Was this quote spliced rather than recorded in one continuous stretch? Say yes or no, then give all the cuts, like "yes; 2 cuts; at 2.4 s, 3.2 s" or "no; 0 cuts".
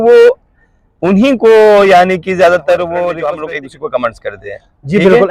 yes; 1 cut; at 3.3 s